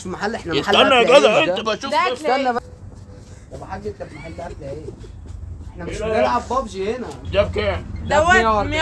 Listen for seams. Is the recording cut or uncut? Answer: cut